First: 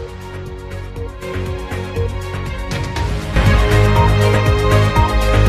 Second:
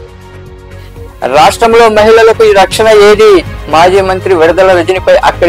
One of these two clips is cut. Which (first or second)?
first